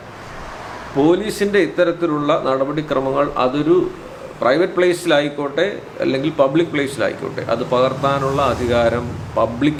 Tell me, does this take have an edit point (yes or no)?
no